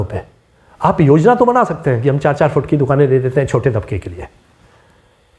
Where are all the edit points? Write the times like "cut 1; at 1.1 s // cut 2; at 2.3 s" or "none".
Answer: none